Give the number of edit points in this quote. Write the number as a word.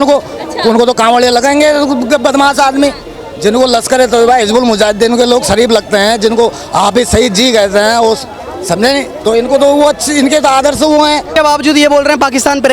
one